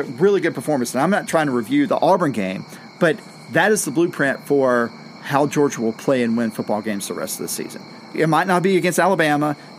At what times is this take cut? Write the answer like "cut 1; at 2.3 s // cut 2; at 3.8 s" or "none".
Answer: cut 1; at 1.9 s // cut 2; at 8.1 s